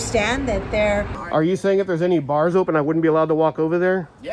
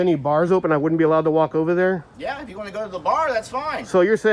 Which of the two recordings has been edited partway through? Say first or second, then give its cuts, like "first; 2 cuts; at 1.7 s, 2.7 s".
first; 1 cut; at 1.1 s